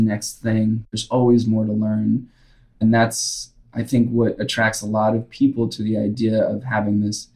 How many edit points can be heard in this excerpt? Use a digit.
2